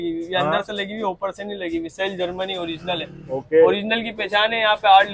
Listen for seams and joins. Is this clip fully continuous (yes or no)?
yes